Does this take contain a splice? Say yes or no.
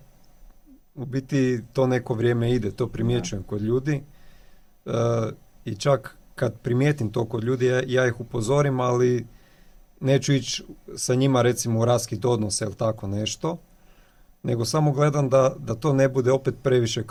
no